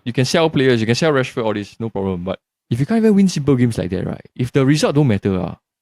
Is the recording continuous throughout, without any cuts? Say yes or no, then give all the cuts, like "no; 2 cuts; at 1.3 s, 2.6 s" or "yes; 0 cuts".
yes; 0 cuts